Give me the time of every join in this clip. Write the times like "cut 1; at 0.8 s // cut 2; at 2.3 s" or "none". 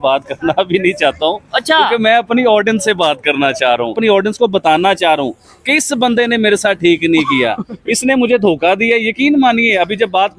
cut 1; at 3.9 s